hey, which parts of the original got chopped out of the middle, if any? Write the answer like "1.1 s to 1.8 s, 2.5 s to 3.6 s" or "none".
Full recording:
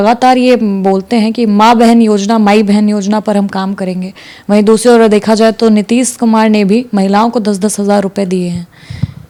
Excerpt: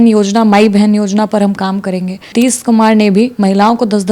4.3 s to 5.9 s